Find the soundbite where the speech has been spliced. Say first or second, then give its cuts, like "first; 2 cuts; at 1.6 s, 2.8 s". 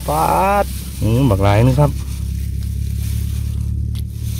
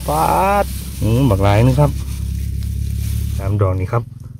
second; 1 cut; at 3.3 s